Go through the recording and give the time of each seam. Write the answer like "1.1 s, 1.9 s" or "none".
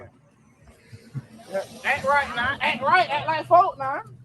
2.3 s